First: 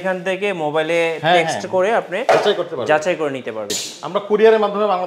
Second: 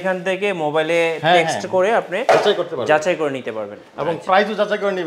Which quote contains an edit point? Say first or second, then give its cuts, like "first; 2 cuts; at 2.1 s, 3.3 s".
first; 1 cut; at 3.8 s